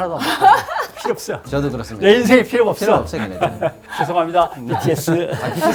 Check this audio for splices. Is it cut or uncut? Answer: uncut